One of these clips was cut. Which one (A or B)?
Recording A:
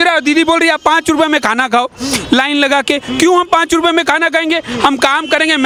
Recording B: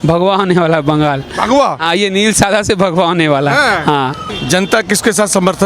B